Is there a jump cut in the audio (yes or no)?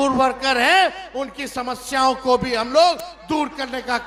no